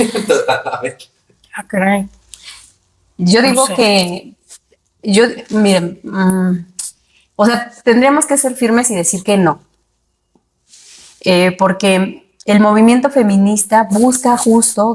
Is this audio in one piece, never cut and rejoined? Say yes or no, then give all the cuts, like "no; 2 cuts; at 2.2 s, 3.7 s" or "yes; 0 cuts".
yes; 0 cuts